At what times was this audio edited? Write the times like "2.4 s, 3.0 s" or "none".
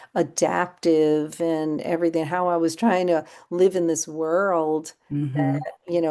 5.0 s